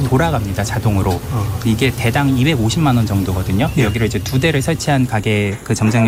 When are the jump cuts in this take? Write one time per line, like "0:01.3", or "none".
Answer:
none